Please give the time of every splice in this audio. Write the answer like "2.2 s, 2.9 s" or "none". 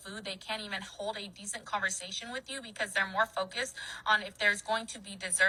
none